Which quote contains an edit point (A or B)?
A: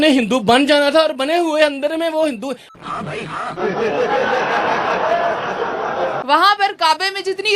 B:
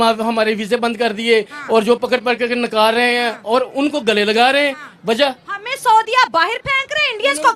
A